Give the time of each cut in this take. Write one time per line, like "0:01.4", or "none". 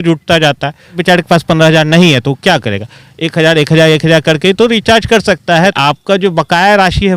0:01.0
0:05.8